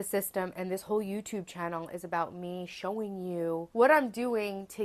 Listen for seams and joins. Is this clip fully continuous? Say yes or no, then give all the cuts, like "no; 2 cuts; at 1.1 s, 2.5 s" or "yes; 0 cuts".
no; 1 cut; at 3.7 s